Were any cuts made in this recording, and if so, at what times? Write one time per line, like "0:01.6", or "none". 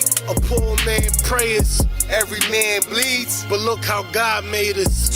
none